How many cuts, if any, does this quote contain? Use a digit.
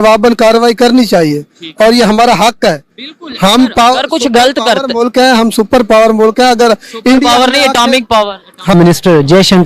1